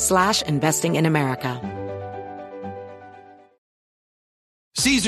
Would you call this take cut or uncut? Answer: cut